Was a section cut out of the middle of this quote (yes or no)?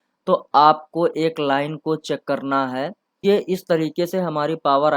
yes